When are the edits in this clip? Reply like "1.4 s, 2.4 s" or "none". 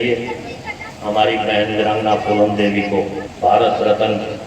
3.2 s